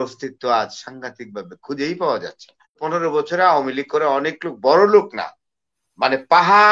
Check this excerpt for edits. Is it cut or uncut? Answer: cut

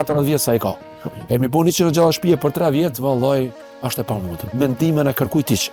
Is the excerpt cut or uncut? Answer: uncut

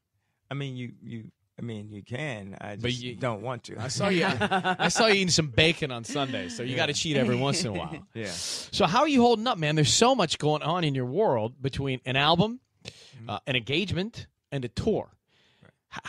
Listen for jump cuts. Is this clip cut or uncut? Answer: uncut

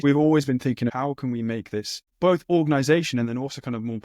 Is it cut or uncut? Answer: cut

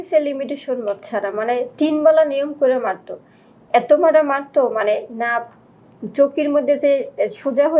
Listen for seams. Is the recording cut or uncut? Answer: uncut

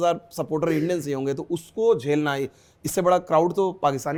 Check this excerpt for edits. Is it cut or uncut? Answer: uncut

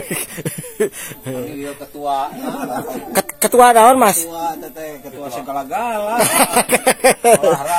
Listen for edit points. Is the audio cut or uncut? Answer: uncut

